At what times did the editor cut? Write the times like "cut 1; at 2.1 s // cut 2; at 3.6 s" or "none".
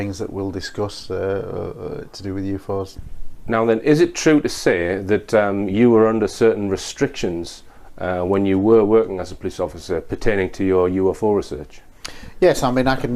none

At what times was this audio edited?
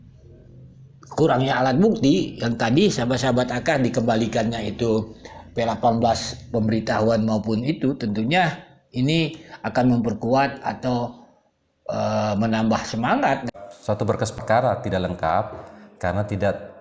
cut 1; at 13.4 s

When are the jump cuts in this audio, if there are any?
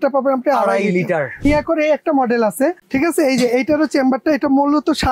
cut 1; at 1.4 s // cut 2; at 2.8 s

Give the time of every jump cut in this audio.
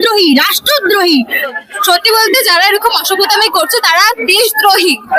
cut 1; at 1.5 s

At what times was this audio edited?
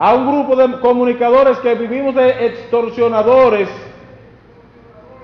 none

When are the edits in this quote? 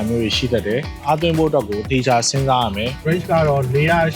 cut 1; at 0.9 s // cut 2; at 3.1 s

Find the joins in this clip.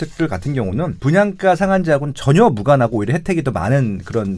cut 1; at 0.9 s

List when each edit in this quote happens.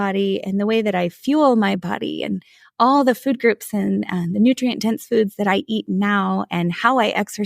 none

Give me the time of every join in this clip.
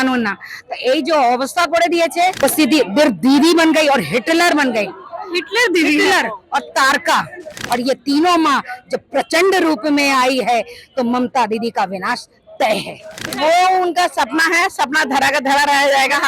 cut 1; at 2.4 s // cut 2; at 7.5 s // cut 3; at 13.3 s

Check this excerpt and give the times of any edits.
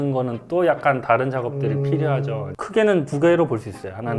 cut 1; at 2.5 s

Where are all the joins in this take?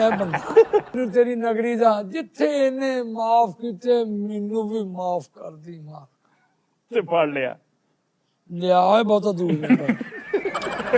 cut 1; at 1.0 s

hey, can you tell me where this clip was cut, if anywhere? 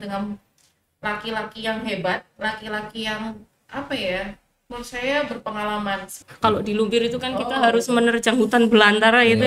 cut 1; at 6.2 s

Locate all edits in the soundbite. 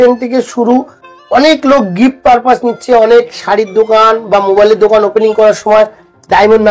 none

